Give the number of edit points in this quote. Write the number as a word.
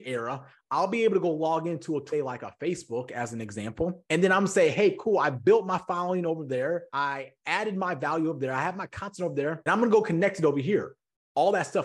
three